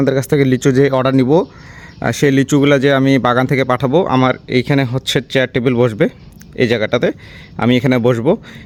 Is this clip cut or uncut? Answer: uncut